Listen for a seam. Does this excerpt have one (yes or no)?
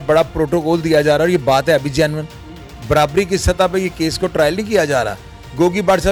no